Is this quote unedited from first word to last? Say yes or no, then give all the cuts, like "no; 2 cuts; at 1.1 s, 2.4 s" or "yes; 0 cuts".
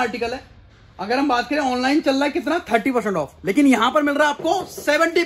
yes; 0 cuts